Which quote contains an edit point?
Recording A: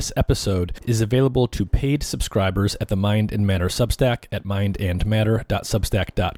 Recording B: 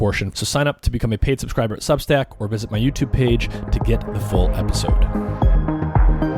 B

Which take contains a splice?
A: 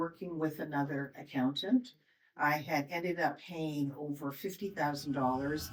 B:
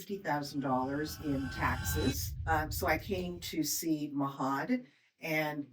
B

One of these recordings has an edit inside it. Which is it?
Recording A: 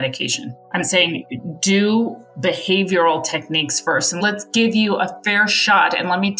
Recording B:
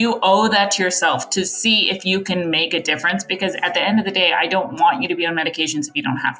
A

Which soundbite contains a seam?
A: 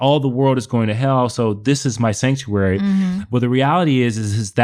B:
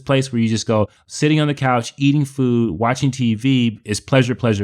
B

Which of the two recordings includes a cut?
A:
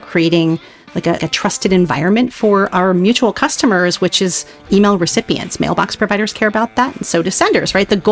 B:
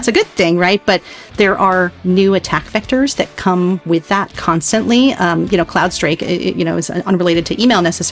A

